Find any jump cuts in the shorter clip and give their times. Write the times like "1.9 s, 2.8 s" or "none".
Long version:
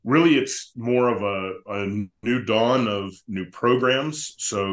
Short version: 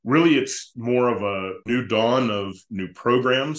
1.6 s